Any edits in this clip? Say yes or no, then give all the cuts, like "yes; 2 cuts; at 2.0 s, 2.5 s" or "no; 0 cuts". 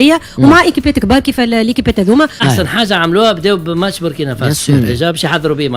yes; 1 cut; at 2.4 s